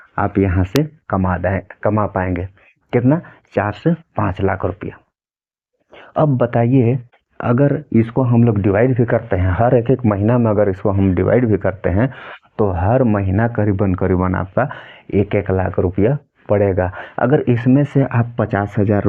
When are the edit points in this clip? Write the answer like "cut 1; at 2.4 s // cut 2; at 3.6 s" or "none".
none